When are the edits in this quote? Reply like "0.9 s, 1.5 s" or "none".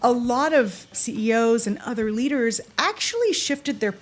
0.9 s